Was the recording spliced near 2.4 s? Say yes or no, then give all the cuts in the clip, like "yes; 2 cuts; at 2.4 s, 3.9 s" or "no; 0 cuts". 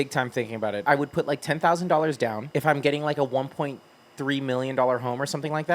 yes; 2 cuts; at 0.8 s, 2.4 s